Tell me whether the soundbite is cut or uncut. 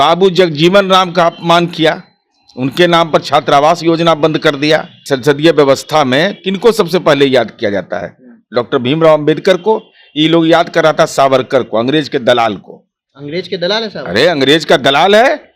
cut